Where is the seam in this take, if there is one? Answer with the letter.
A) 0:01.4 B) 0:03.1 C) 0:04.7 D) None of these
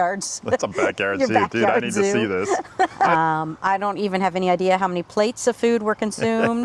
B